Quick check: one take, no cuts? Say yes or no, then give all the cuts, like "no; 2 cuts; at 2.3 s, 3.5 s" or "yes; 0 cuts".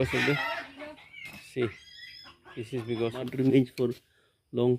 no; 1 cut; at 3.3 s